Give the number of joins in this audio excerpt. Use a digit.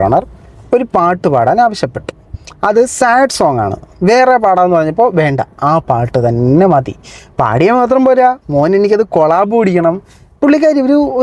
0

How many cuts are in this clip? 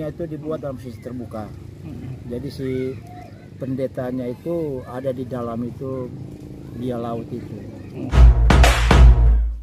1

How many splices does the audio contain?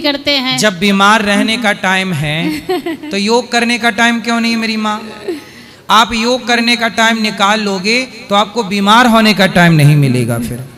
0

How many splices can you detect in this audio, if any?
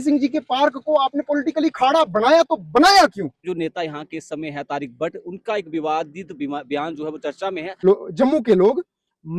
2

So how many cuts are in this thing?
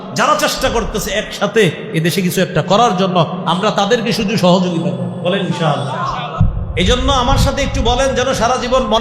1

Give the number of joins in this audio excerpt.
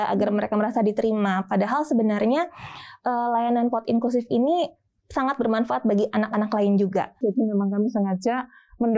1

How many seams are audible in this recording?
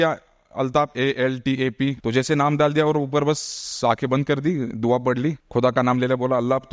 2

